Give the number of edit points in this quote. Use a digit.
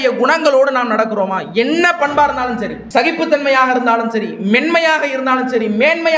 1